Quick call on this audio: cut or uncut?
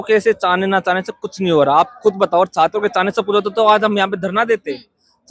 uncut